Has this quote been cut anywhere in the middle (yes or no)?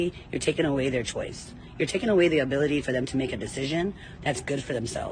no